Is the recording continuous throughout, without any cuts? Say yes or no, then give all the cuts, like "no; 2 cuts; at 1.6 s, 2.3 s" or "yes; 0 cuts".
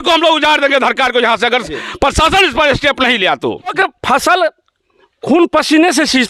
no; 1 cut; at 3.8 s